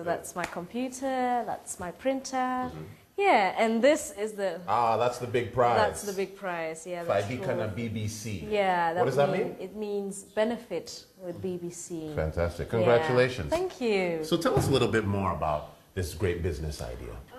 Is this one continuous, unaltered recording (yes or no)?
no